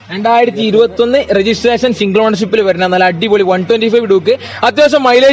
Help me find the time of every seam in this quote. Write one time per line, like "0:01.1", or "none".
none